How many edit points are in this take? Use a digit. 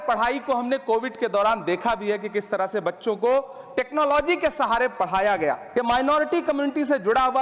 1